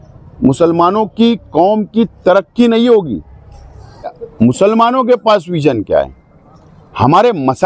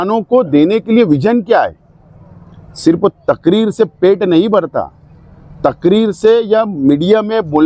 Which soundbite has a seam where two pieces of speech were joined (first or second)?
first